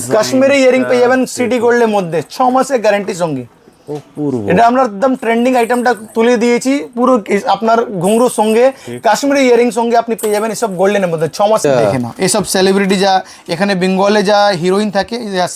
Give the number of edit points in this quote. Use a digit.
1